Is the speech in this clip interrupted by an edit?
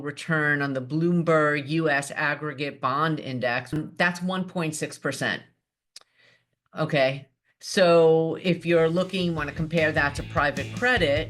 yes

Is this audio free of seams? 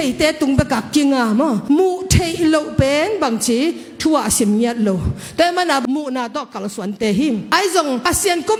yes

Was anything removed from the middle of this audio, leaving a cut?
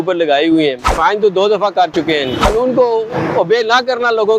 yes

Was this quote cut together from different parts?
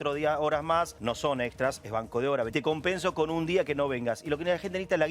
yes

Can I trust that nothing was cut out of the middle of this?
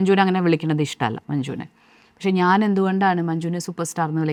yes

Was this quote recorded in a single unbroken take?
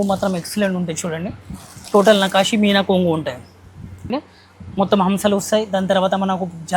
no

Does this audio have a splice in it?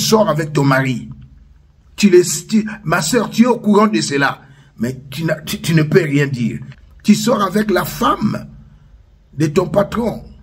yes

